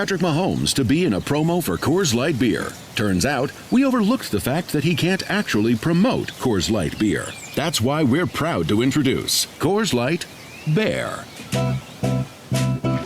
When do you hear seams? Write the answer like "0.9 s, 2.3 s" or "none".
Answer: 1.7 s, 11.5 s